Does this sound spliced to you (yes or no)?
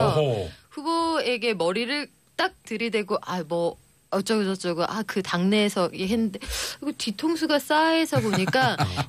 yes